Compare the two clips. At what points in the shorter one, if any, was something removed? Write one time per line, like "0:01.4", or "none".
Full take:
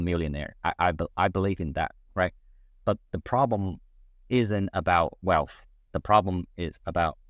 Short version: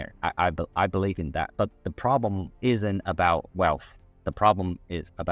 0:01.5
0:02.5